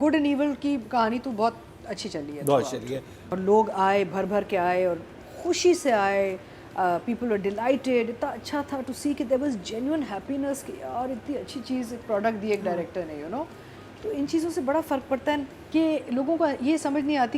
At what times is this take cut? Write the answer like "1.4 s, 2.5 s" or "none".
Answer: 3.2 s, 15.6 s